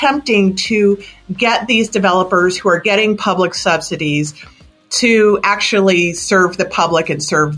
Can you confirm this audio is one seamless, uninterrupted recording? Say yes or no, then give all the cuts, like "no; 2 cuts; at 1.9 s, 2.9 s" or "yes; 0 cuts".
yes; 0 cuts